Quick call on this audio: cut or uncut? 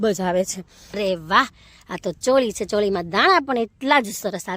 cut